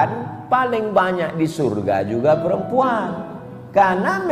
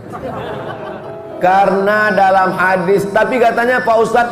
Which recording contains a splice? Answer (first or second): second